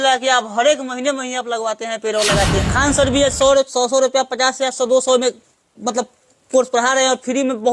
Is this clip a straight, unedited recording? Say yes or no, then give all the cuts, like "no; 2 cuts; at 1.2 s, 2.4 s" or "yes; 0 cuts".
no; 1 cut; at 2.7 s